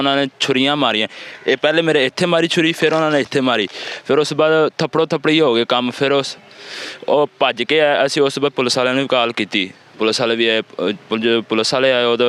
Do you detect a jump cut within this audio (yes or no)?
no